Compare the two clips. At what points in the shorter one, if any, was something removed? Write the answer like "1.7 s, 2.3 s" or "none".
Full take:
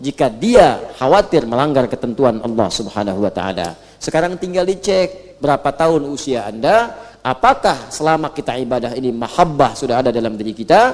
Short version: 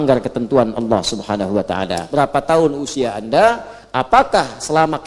2.0 s